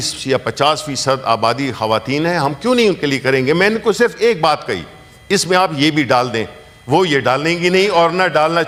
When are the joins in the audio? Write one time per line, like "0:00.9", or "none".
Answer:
none